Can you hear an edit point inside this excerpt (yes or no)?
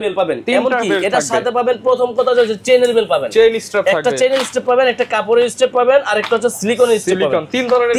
no